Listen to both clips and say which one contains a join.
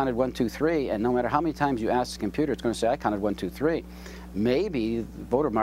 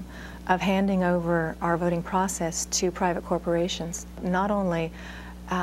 second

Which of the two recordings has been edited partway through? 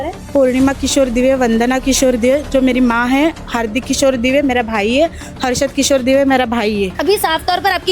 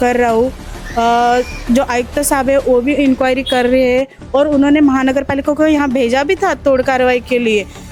first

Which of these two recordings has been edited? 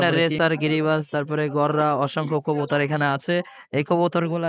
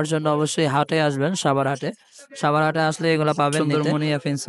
second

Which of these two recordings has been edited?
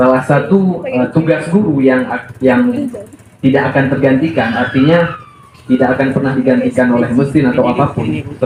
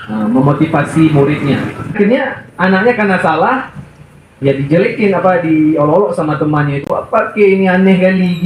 second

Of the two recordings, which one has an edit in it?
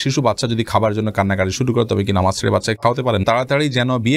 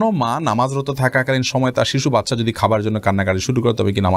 first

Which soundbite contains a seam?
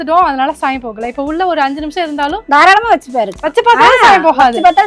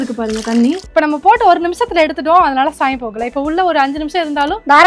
second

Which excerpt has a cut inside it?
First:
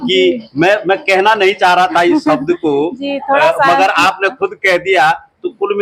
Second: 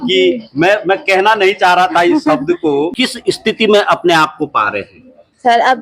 second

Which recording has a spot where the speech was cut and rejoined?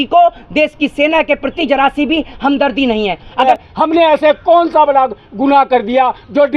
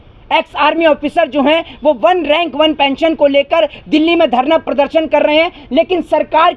first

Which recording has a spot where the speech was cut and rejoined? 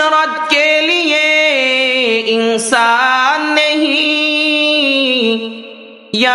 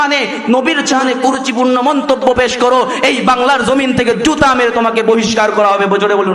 second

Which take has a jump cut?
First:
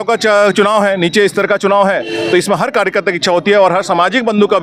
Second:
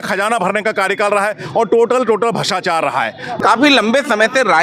second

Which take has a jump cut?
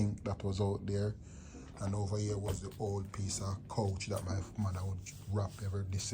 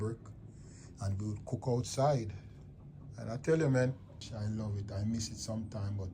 second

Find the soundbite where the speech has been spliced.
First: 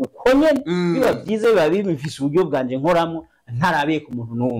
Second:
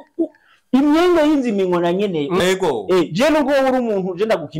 second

